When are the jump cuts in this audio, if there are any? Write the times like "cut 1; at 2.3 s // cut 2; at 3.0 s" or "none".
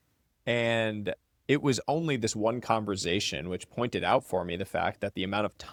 none